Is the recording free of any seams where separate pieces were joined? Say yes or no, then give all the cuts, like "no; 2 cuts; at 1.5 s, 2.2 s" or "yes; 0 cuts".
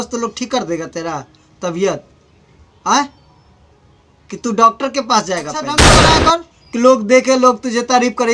no; 1 cut; at 6.0 s